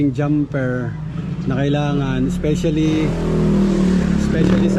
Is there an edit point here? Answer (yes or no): no